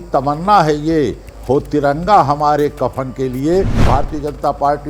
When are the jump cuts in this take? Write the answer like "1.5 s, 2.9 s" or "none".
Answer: 3.8 s